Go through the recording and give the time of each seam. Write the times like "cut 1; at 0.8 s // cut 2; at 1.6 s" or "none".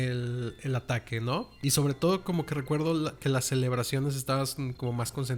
cut 1; at 1.5 s